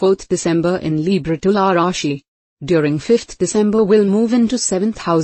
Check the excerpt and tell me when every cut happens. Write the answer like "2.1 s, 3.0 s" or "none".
none